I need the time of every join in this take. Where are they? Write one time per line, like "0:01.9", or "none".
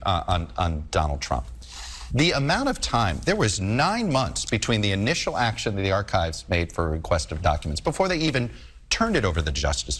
none